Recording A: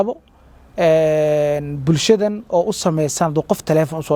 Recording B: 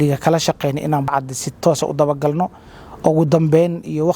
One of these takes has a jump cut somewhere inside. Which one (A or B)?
B